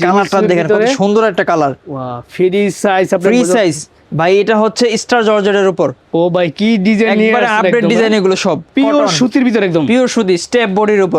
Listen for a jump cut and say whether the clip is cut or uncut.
cut